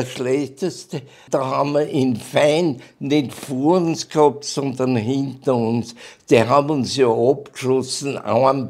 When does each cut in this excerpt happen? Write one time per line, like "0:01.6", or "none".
0:01.2